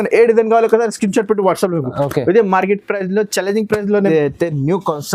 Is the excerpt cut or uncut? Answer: cut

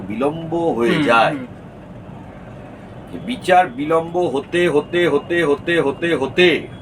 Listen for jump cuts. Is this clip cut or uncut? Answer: uncut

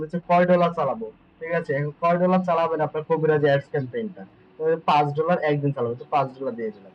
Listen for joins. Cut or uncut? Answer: uncut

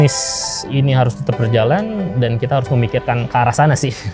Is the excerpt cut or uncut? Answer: uncut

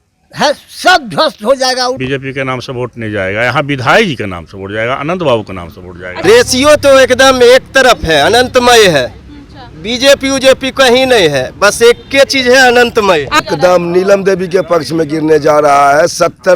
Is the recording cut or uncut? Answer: cut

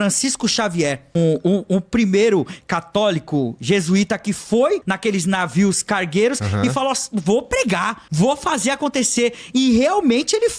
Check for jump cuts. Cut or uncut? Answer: cut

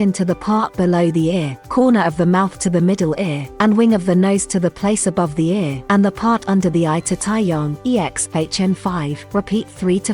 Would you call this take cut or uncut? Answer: cut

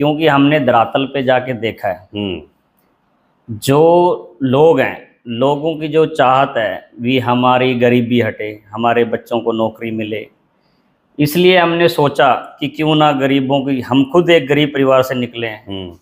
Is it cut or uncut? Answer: uncut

